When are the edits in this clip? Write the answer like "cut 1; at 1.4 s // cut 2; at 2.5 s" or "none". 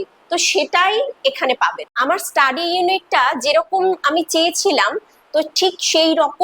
cut 1; at 1.9 s